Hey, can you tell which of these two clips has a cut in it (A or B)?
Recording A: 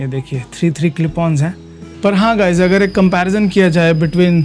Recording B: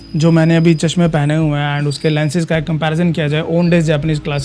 A